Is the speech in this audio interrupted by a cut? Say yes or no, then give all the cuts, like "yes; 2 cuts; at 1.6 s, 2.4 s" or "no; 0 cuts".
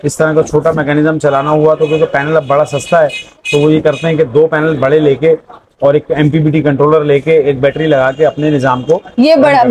no; 0 cuts